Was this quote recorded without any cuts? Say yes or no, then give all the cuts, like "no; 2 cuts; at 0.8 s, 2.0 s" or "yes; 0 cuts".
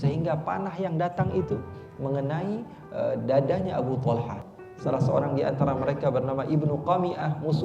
no; 1 cut; at 4.4 s